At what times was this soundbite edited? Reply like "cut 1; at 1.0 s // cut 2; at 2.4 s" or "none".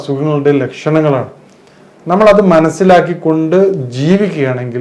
none